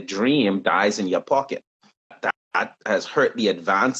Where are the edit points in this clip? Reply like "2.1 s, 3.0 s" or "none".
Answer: 2.2 s